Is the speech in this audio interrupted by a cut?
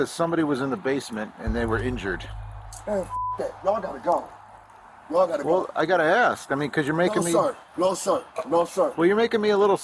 no; 0 cuts

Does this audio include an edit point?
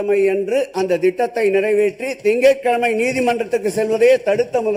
no; 0 cuts

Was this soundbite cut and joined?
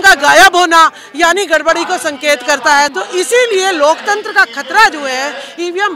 yes; 1 cut; at 2.9 s

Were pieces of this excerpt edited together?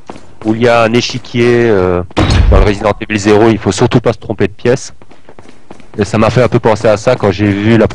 yes; 1 cut; at 3.4 s

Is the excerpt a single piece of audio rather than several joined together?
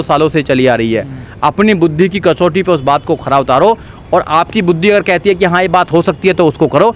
yes; 0 cuts

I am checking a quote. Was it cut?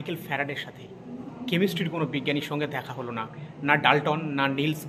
yes; 1 cut; at 1.2 s

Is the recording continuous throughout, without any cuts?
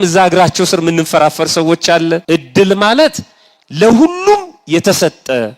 no; 1 cut; at 2.2 s

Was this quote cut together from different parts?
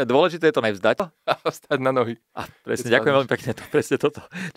yes; 1 cut; at 1.1 s

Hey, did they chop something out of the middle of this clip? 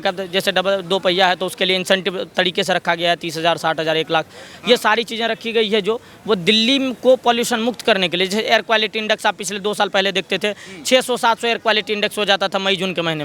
no; 0 cuts

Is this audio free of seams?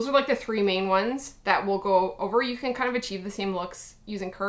yes; 0 cuts

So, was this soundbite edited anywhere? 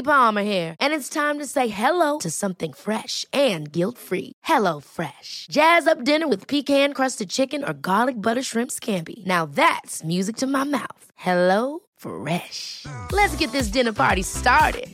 no; 0 cuts

